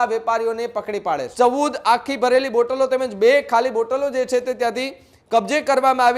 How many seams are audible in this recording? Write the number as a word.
one